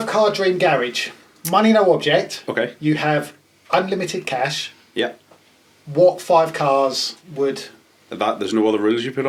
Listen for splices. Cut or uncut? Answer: uncut